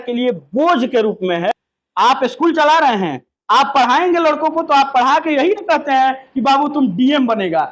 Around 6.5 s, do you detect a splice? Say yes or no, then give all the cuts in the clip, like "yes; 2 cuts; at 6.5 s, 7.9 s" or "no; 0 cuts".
no; 1 cut; at 1.7 s